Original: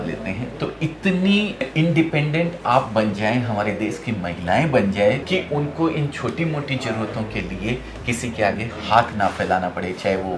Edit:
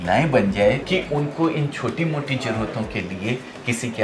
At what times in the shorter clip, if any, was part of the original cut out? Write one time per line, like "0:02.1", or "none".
none